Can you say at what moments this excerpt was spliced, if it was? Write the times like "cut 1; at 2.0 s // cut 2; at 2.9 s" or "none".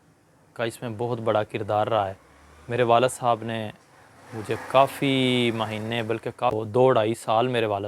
cut 1; at 6.5 s